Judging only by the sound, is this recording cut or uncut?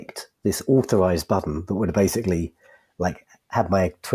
uncut